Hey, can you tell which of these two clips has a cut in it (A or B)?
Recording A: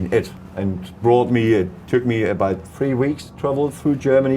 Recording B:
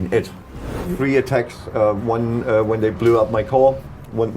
B